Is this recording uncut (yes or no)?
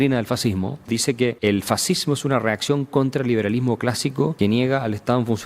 no